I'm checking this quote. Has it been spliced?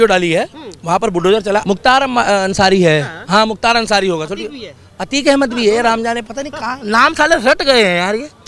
yes; 1 cut; at 1.6 s

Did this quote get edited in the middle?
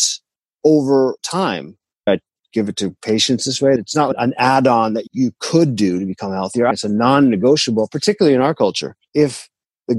yes; 4 cuts; at 2.1 s, 3.8 s, 6.7 s, 8.9 s

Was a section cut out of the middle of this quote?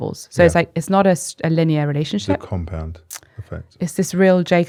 no; 0 cuts

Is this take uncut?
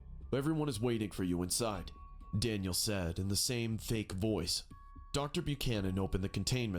yes; 0 cuts

